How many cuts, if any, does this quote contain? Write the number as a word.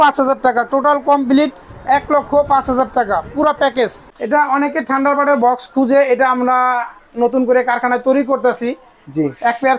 one